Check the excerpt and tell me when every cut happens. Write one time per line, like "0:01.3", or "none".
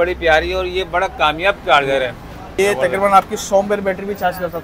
0:02.6